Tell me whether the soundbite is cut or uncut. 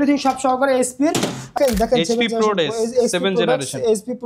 cut